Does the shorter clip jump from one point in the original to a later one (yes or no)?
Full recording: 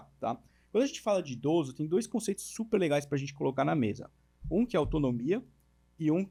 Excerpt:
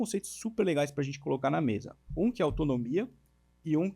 yes